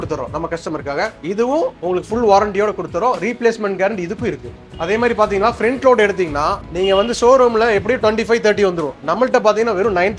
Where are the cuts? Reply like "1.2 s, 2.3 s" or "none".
none